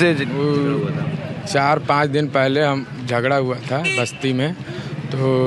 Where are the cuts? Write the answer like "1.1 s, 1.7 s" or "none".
none